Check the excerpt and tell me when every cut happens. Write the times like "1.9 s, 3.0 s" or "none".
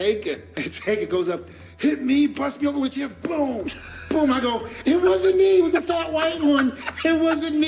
none

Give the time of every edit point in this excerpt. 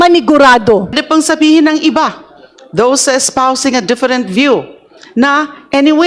1.0 s

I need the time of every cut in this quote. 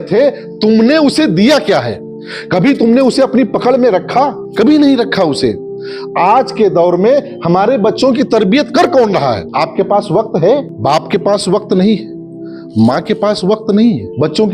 none

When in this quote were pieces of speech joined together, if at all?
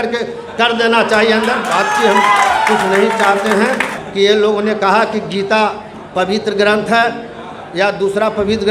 4.0 s

